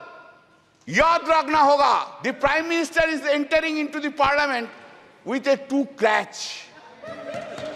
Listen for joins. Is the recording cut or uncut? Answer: cut